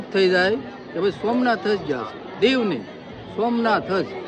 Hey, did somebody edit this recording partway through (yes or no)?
no